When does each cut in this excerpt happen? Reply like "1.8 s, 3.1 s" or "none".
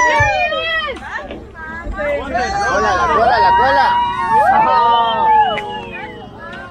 none